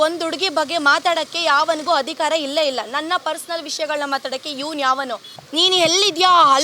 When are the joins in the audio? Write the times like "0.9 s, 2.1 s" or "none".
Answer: 5.3 s